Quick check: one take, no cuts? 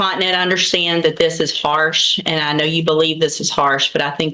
yes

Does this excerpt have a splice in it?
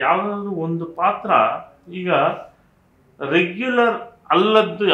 no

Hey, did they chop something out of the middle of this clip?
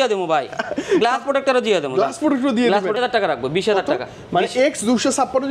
yes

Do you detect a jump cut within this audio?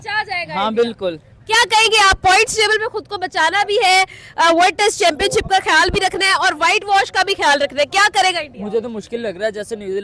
no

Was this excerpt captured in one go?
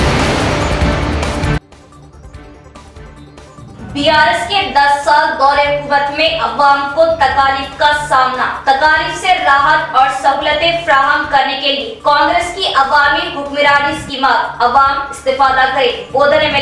no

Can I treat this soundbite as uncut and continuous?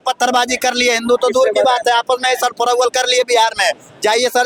yes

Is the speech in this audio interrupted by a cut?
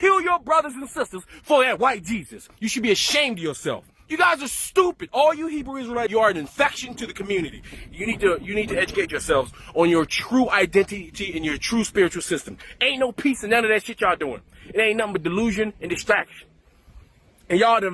yes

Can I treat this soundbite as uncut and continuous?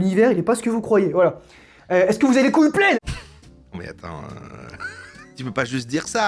no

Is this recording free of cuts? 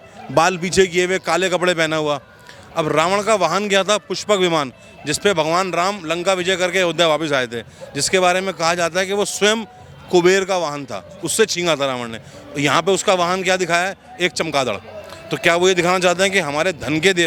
yes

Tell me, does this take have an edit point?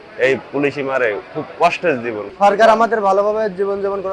yes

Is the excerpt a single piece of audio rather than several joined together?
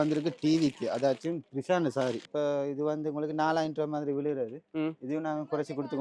no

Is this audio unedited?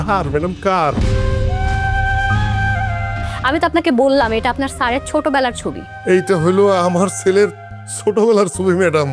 no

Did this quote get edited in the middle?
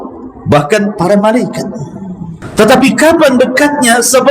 yes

